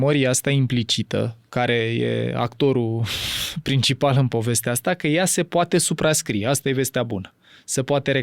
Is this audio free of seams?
yes; 0 cuts

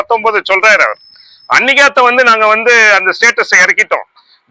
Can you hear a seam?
no; 0 cuts

